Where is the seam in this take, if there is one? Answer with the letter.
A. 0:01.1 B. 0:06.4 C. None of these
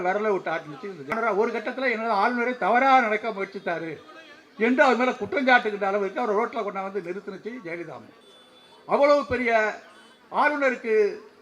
A